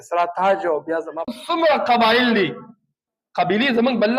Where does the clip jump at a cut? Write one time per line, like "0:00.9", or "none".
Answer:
0:01.3